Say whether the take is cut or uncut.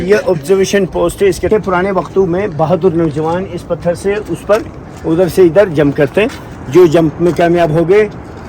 cut